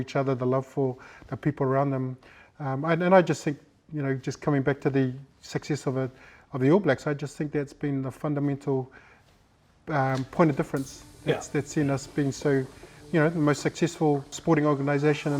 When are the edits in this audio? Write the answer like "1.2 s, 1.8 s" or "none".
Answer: 14.4 s